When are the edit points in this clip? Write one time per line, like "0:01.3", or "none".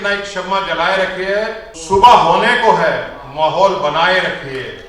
0:01.7